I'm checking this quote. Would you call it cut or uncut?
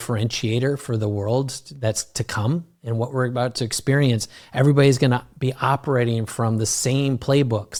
uncut